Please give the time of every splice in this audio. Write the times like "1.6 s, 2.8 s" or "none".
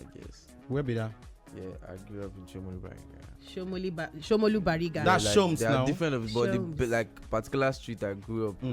none